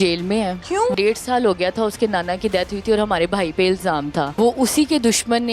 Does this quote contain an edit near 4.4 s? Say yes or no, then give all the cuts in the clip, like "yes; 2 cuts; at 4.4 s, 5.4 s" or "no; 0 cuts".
yes; 2 cuts; at 0.9 s, 4.4 s